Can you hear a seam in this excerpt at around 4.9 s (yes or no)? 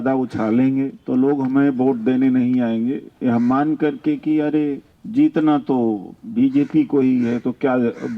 yes